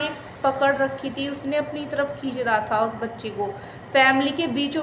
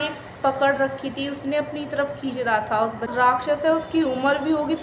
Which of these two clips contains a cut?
second; 1 cut; at 3.1 s

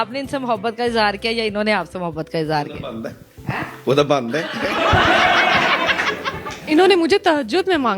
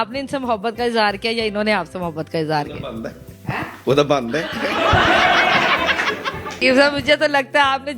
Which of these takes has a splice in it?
second; 1 cut; at 6.6 s

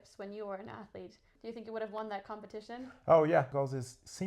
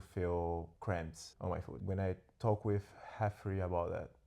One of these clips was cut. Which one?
first; 2 cuts; at 1.3 s, 3.5 s

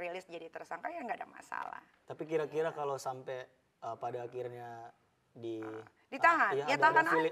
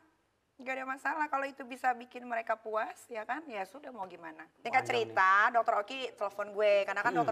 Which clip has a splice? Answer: second; 1 cut; at 4.5 s

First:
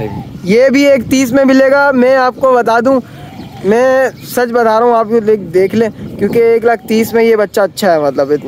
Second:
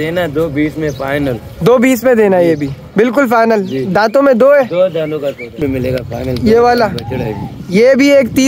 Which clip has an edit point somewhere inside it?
second; 1 cut; at 5.6 s

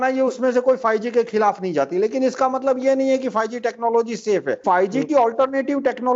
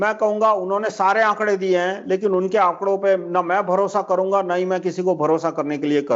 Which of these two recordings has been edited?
first; 1 cut; at 4.6 s

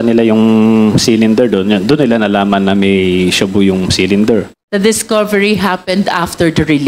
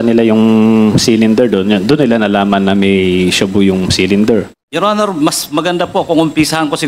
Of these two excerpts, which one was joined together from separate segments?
second; 1 cut; at 4.6 s

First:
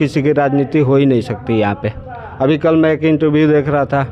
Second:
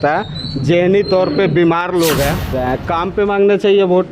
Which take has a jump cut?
second; 1 cut; at 2.6 s

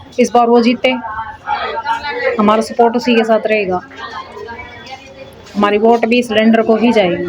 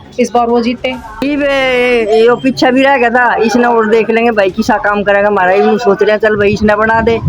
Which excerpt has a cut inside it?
second; 1 cut; at 1.2 s

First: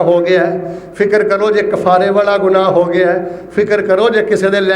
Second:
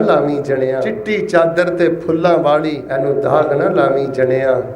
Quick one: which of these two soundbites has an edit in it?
second; 2 cuts; at 0.9 s, 2.8 s

